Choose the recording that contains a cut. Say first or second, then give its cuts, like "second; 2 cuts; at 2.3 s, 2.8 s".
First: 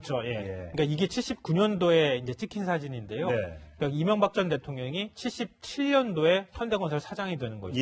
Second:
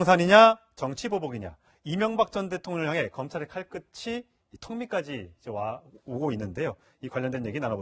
first; 1 cut; at 4.8 s